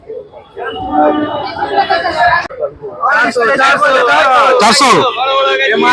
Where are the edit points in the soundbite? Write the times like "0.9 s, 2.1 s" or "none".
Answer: 2.4 s